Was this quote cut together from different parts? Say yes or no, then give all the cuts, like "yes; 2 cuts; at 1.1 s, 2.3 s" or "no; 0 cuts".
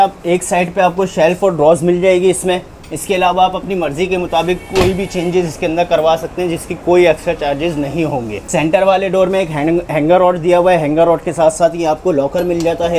yes; 1 cut; at 8.4 s